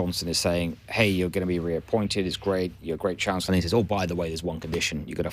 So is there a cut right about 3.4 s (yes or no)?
yes